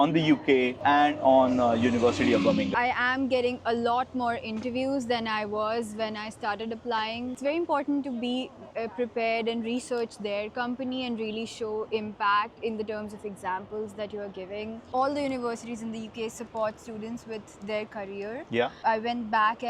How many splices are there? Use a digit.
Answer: 3